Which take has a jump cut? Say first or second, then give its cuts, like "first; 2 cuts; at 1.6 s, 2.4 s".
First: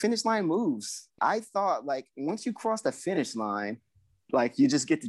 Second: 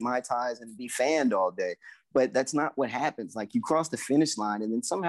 first; 1 cut; at 1.2 s